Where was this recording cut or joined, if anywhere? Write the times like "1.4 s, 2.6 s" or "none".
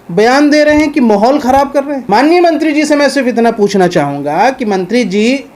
2.0 s